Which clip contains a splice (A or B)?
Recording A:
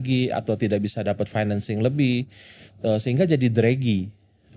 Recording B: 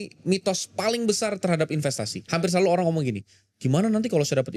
B